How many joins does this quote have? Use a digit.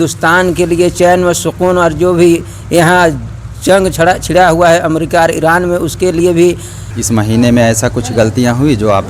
1